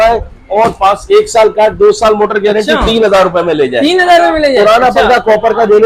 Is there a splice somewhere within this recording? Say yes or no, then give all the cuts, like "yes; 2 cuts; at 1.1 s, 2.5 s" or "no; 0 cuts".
no; 0 cuts